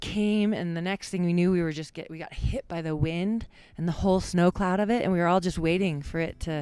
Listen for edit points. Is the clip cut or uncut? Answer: uncut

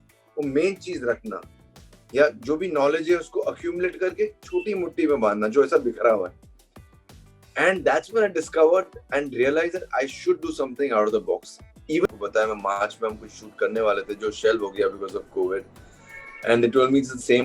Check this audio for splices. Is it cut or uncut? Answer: cut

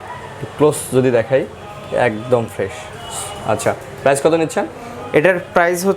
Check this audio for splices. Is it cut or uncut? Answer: uncut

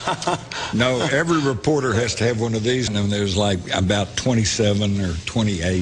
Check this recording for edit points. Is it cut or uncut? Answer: uncut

